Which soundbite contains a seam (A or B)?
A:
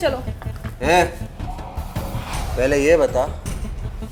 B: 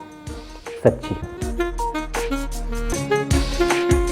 B